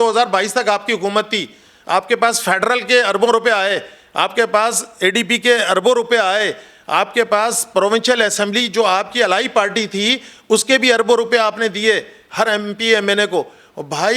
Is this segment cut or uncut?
uncut